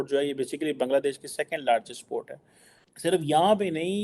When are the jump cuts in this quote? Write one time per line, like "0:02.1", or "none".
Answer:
0:02.9